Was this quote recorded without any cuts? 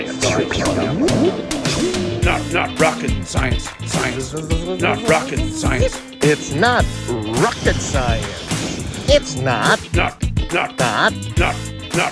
yes; 0 cuts

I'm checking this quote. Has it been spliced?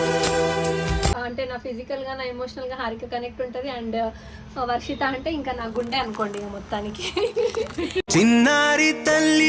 yes; 1 cut; at 1.1 s

